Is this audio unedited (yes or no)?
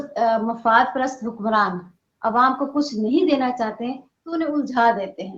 yes